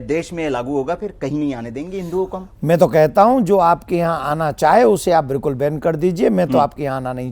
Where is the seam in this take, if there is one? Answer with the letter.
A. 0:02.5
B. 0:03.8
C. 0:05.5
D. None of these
D